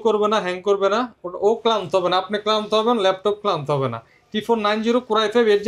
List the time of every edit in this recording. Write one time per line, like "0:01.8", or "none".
none

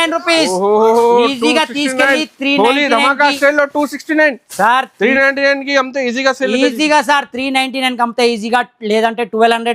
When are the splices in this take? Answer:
none

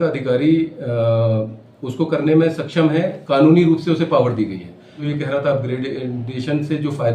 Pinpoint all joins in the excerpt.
0:05.0

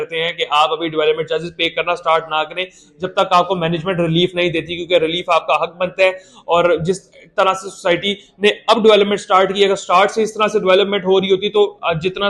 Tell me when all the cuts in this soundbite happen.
none

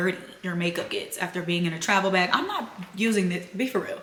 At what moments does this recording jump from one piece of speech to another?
none

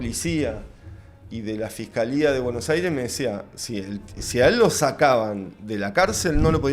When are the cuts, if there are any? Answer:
none

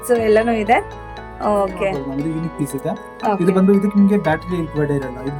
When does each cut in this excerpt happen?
0:02.0

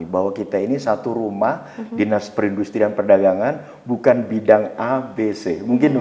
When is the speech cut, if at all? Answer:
none

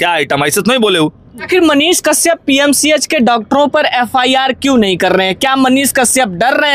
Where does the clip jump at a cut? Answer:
0:01.3

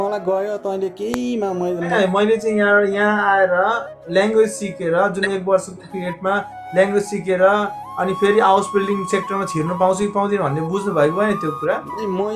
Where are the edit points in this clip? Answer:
0:01.9

